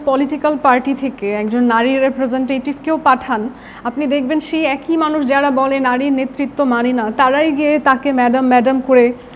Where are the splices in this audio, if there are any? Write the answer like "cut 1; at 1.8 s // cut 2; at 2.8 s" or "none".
none